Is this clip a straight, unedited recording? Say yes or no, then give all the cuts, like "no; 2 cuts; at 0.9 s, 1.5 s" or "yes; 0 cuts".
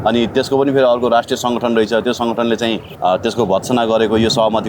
no; 1 cut; at 2.9 s